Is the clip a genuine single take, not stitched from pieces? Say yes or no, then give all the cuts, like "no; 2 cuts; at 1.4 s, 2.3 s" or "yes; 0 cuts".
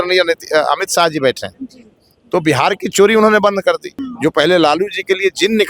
no; 1 cut; at 3.9 s